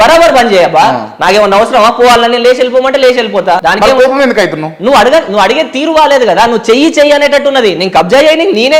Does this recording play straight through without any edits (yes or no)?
no